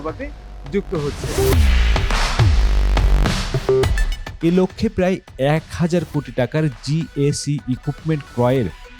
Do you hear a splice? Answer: yes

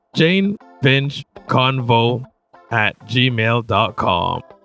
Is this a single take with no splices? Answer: yes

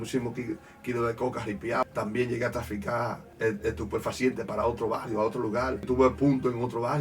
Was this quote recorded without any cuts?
no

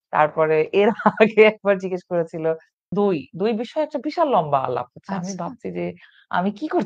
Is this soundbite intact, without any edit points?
no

